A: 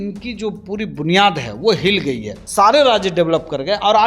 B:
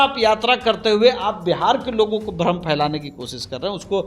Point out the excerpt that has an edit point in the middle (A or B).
A